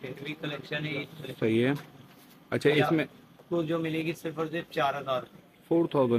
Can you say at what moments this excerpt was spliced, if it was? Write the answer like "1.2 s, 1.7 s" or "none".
none